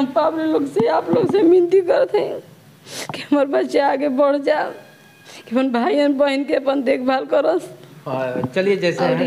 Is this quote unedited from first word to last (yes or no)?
yes